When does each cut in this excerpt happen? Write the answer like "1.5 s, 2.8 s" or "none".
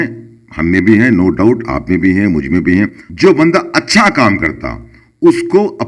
3.0 s